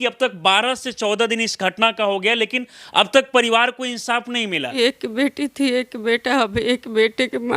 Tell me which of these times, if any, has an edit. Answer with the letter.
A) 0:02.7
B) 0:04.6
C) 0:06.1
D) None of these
B